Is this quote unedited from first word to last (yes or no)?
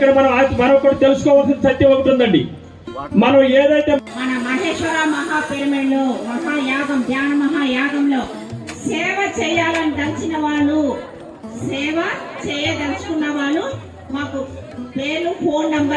no